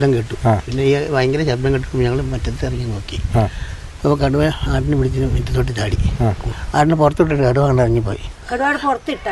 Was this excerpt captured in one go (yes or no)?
no